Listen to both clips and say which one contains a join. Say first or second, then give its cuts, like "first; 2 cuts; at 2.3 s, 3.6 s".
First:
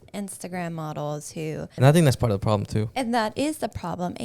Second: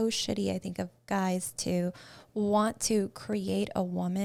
first; 1 cut; at 1.8 s